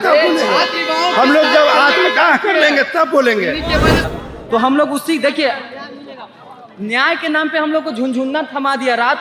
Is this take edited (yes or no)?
yes